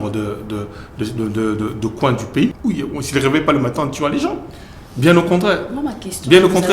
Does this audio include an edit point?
yes; 1 cut; at 2.6 s

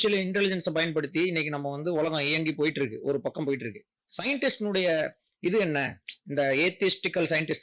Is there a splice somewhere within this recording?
no; 0 cuts

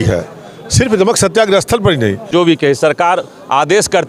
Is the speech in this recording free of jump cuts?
no; 1 cut; at 2.3 s

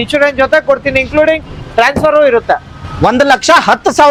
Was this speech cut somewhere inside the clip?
no; 0 cuts

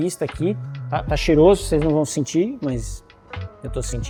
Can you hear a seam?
no; 0 cuts

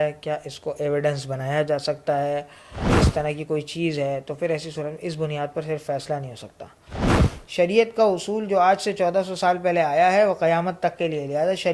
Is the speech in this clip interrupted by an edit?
yes; 2 cuts; at 2.9 s, 7.1 s

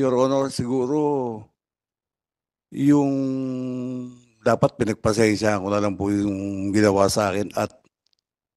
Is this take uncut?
yes; 0 cuts

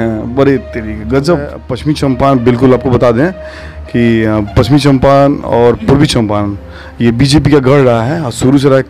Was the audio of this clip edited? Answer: yes; 1 cut; at 1.7 s

